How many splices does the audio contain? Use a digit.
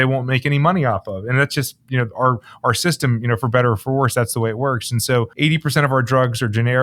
1